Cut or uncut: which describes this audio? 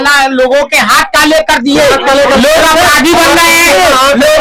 uncut